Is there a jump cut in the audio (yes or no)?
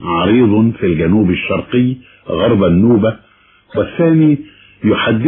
no